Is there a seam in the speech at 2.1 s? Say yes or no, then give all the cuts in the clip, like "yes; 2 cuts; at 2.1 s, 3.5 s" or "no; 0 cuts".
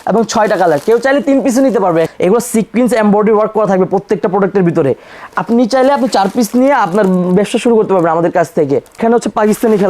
yes; 2 cuts; at 2.1 s, 9.0 s